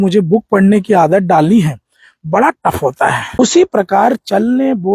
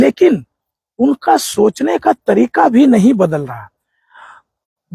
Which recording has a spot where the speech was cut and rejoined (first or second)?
first